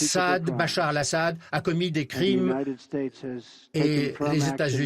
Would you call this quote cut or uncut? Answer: cut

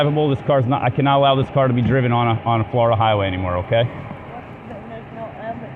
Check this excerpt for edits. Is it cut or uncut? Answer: uncut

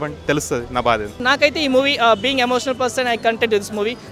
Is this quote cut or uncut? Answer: cut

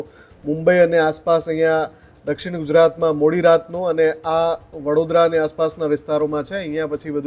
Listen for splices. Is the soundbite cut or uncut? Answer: uncut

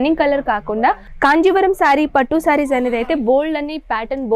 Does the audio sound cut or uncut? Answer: cut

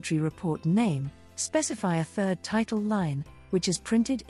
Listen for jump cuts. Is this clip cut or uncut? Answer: uncut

